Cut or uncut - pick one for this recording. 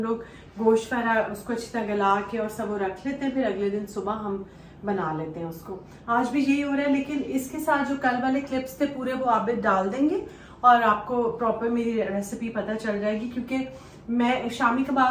uncut